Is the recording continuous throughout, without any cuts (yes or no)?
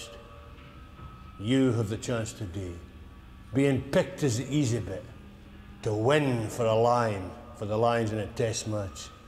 yes